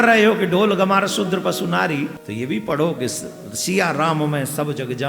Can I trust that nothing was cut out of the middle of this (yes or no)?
no